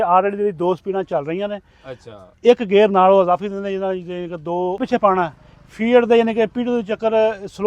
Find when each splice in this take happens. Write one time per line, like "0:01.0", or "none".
0:04.8